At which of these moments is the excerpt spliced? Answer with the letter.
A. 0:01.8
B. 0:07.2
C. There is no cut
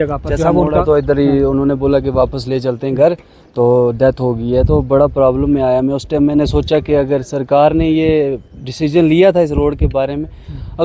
C